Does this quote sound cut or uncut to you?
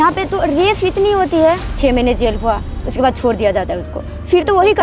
cut